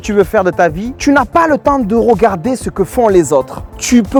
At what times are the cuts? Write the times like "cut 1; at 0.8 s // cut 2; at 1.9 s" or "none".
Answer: none